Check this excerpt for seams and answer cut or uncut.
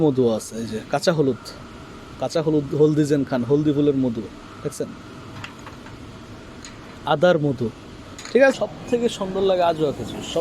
cut